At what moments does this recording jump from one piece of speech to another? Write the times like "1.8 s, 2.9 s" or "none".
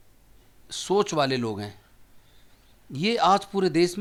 none